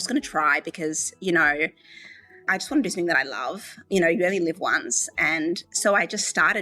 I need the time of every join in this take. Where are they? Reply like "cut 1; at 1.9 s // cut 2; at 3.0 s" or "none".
cut 1; at 2.5 s // cut 2; at 3.8 s